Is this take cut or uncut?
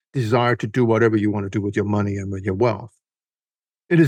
uncut